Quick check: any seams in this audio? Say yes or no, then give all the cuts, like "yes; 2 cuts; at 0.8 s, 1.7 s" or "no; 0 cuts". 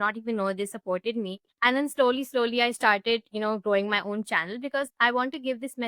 yes; 2 cuts; at 1.4 s, 4.9 s